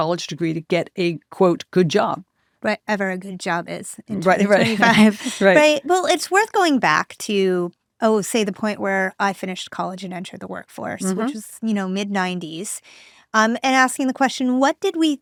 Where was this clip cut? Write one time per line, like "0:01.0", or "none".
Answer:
none